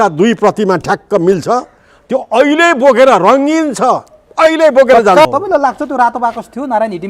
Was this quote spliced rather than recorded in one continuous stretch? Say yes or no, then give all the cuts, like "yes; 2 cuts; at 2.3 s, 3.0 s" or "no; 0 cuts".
yes; 1 cut; at 5.2 s